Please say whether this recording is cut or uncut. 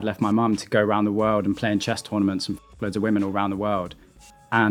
uncut